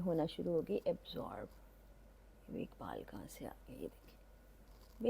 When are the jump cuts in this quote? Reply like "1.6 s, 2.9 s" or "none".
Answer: none